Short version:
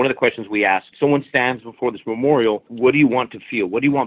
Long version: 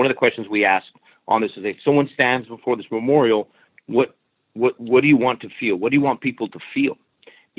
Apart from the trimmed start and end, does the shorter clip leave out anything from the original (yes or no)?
yes